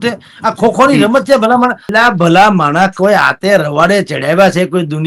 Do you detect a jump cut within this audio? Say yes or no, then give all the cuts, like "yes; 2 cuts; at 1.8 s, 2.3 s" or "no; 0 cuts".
yes; 1 cut; at 1.8 s